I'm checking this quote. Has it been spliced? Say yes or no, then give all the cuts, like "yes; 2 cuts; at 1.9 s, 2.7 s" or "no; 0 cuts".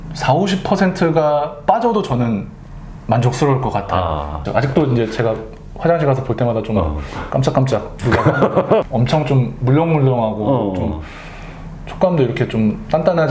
yes; 2 cuts; at 4.4 s, 8.9 s